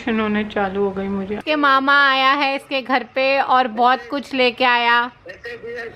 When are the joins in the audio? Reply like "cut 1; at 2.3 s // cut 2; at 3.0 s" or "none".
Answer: cut 1; at 1.4 s